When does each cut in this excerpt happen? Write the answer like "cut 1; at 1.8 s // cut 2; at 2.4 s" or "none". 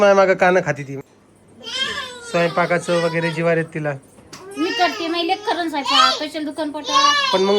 cut 1; at 0.9 s